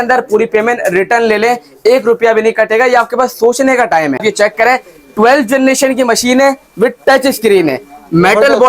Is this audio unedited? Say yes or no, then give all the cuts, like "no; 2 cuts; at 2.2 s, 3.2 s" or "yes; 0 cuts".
no; 1 cut; at 4.3 s